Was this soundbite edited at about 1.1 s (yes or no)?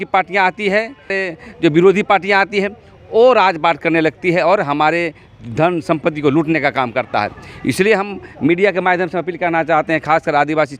yes